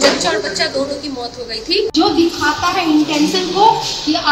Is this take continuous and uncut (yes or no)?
no